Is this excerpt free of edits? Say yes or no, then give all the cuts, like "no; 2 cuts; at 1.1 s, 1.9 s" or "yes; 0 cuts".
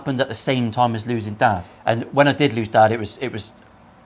no; 1 cut; at 1.7 s